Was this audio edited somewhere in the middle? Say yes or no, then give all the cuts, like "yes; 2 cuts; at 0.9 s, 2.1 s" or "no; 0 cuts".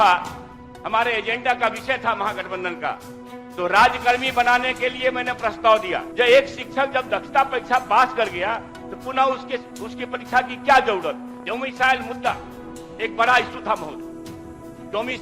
yes; 2 cuts; at 6.1 s, 11.3 s